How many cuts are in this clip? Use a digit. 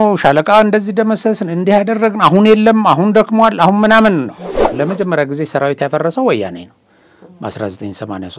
1